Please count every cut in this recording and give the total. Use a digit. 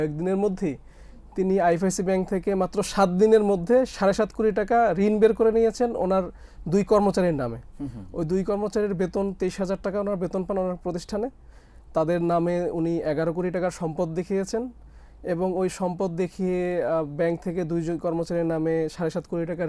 0